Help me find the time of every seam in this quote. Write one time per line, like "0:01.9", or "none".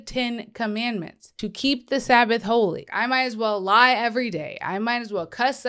0:01.2
0:02.8